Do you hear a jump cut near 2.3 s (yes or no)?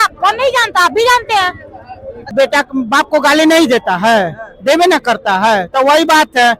yes